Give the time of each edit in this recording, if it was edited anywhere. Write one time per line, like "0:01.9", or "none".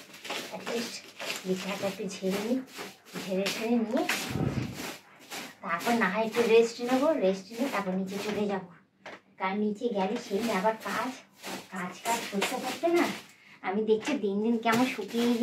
none